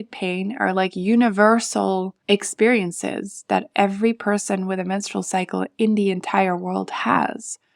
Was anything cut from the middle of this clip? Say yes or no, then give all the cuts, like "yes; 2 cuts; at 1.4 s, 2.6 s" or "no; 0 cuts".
yes; 1 cut; at 2.1 s